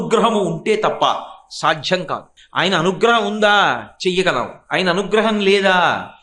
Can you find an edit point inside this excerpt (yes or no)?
yes